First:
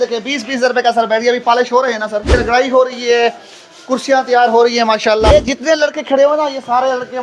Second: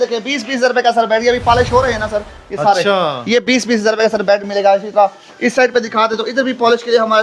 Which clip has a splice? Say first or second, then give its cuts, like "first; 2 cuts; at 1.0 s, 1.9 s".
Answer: first; 2 cuts; at 2.3 s, 5.3 s